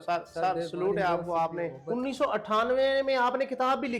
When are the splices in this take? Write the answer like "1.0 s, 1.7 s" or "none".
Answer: 1.8 s